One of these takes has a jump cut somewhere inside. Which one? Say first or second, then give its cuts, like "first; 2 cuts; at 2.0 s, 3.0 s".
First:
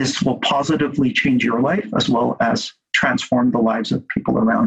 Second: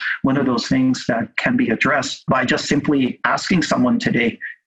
second; 1 cut; at 2.3 s